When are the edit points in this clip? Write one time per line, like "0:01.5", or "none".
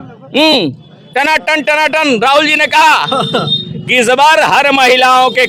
none

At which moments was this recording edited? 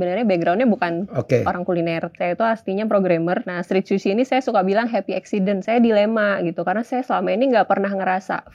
0:02.1
0:03.5
0:05.6

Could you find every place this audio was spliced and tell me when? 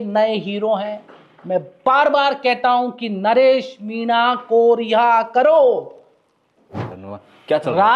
0:06.9

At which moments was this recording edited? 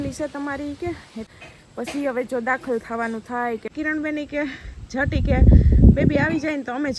0:01.3
0:03.7

